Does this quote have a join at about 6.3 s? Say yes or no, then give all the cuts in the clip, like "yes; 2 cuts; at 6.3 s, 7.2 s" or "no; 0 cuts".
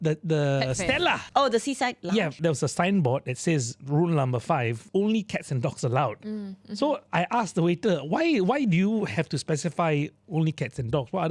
no; 3 cuts; at 1.2 s, 2.4 s, 4.8 s